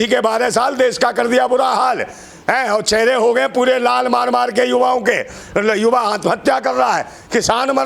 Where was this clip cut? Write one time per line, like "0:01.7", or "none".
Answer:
none